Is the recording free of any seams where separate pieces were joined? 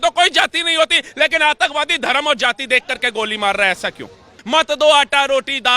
no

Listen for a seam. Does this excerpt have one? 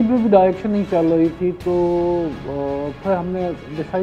no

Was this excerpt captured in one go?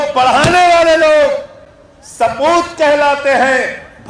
yes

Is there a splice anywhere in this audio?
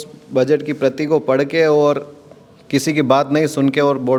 no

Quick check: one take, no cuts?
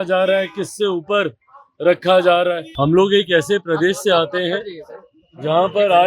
no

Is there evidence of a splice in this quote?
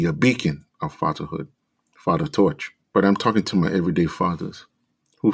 yes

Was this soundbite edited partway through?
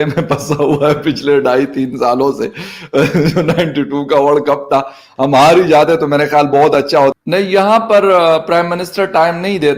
yes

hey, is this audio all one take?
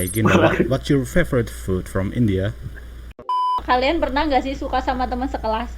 no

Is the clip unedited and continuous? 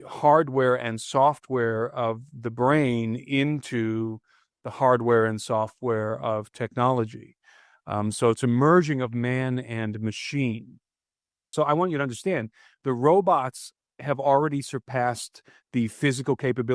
no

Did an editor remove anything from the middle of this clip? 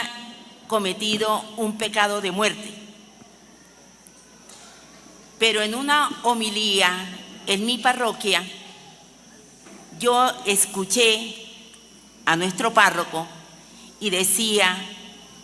no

